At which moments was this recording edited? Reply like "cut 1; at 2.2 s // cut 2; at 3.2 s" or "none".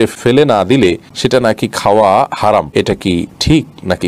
cut 1; at 1.1 s // cut 2; at 3.2 s